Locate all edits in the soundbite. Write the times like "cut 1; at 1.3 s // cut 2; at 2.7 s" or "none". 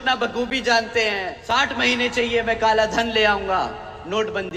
cut 1; at 1.3 s